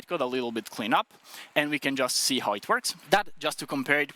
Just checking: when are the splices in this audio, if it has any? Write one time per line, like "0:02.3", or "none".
0:02.9